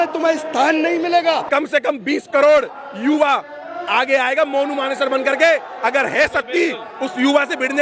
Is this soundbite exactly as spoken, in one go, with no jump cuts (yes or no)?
no